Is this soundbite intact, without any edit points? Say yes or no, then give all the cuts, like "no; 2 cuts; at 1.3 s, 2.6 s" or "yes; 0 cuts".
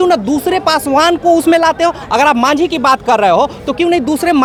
yes; 0 cuts